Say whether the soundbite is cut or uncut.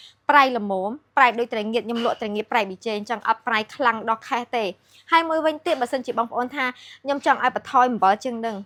uncut